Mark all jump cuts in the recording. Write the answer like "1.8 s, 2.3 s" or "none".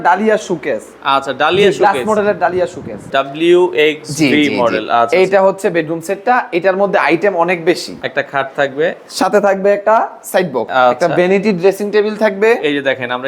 3.0 s, 8.1 s, 10.7 s